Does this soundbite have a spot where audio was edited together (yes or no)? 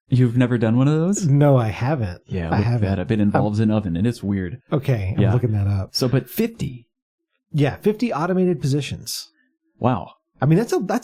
no